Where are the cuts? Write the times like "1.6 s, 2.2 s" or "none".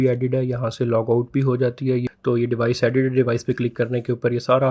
2.0 s